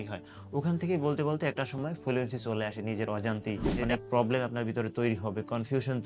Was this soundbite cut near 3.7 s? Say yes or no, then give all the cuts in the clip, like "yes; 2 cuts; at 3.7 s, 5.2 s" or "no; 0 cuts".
yes; 1 cut; at 3.7 s